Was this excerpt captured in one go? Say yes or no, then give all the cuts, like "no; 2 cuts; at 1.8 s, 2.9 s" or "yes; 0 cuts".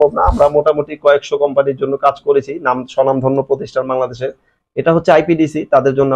yes; 0 cuts